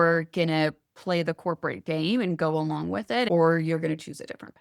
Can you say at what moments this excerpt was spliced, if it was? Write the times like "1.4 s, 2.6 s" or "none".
3.3 s